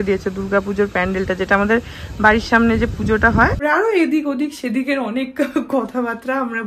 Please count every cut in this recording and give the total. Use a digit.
1